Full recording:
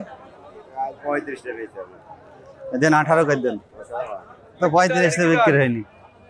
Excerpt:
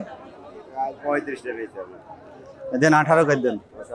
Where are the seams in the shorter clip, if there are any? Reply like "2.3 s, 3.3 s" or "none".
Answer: none

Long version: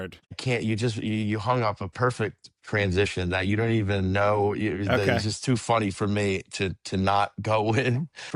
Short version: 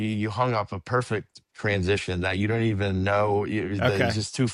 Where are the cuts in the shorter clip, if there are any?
none

